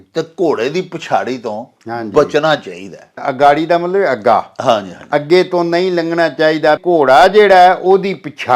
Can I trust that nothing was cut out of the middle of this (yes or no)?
no